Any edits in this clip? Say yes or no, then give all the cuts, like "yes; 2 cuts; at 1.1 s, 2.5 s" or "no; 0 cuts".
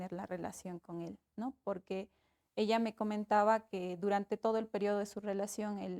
no; 0 cuts